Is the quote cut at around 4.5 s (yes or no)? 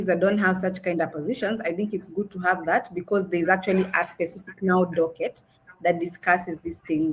no